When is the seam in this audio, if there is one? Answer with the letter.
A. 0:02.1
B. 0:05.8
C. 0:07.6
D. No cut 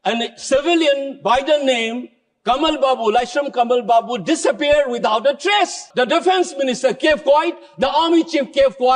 B